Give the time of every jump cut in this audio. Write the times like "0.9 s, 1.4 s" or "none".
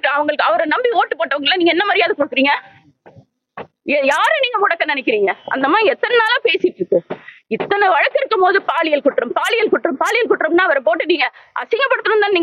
none